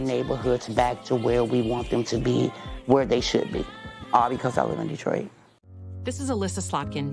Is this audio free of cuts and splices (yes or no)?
no